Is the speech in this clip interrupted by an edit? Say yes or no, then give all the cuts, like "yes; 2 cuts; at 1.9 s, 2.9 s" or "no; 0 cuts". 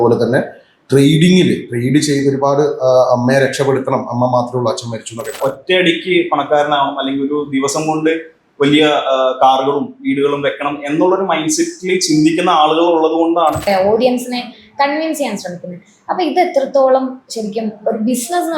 yes; 2 cuts; at 5.4 s, 13.7 s